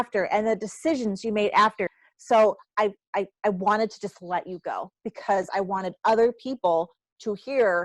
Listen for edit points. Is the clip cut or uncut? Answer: cut